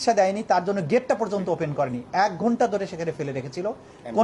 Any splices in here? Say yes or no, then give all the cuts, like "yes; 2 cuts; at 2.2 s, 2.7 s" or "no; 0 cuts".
no; 0 cuts